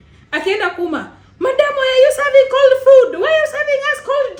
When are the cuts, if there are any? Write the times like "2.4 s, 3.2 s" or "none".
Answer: none